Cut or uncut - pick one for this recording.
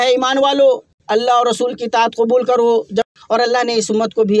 cut